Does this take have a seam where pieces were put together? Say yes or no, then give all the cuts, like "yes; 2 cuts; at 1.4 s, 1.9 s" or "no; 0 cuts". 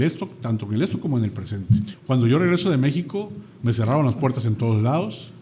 yes; 1 cut; at 2.0 s